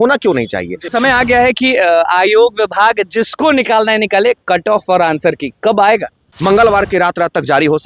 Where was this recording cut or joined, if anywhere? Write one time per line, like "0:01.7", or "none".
0:00.9
0:06.3

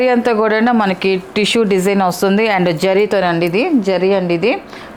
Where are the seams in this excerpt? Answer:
none

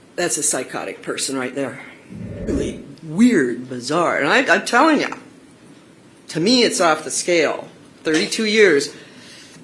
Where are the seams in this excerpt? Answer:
0:02.5

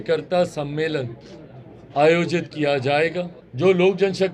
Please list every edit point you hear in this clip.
0:03.4

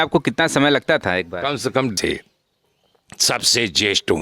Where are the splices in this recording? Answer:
0:02.0

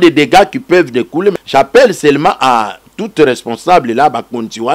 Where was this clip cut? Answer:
0:01.4

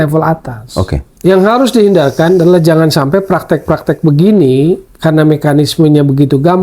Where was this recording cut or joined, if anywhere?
0:01.0

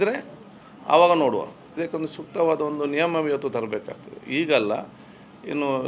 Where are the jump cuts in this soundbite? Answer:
0:01.8

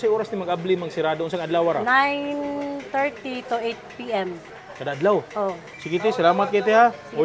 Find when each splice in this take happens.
0:04.6
0:05.7

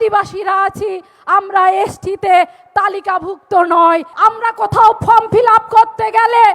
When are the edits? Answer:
0:04.1

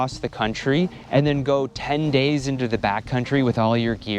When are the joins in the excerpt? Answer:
0:01.0

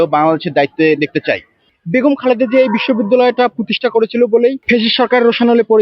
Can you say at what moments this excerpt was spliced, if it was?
0:01.7

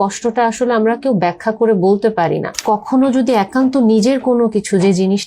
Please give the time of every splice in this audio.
0:02.5

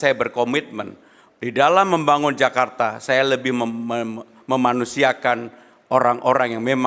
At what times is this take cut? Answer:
none

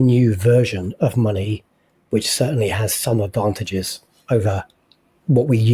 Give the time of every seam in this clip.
none

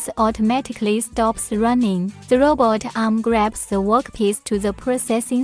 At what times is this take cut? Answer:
0:02.2

